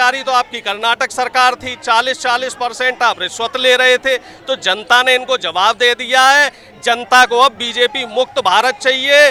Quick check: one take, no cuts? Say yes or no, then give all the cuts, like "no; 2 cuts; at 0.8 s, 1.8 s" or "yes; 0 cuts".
yes; 0 cuts